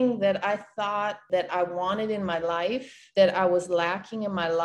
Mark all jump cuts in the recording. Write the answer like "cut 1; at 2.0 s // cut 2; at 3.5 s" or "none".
cut 1; at 1.2 s // cut 2; at 2.9 s